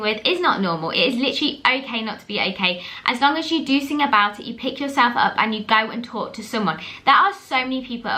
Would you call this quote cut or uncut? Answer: uncut